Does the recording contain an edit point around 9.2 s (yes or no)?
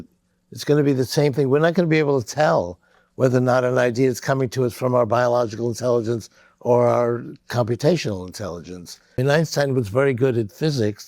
yes